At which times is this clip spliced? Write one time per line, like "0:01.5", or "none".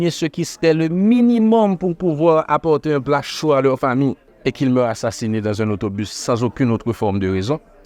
0:04.3